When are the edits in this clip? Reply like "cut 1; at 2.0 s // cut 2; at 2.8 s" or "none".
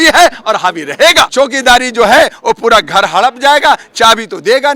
cut 1; at 1.3 s